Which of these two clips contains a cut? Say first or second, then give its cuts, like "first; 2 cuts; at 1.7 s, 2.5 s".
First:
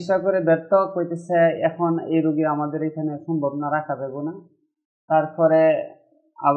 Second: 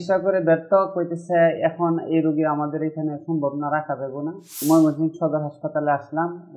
second; 1 cut; at 4.5 s